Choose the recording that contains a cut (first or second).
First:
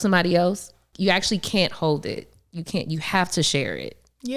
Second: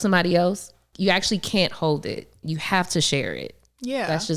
second